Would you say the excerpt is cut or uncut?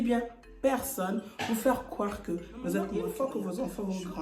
cut